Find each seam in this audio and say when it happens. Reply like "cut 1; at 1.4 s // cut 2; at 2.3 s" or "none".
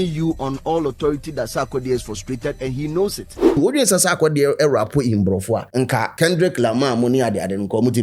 cut 1; at 3.6 s // cut 2; at 6.1 s